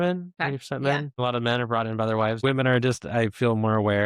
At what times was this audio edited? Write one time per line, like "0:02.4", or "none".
0:01.1
0:02.4